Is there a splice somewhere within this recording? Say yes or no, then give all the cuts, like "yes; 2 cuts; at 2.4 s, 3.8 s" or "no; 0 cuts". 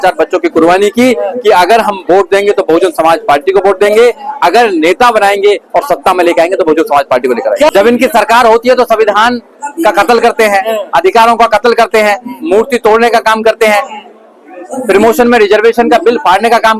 yes; 1 cut; at 7.7 s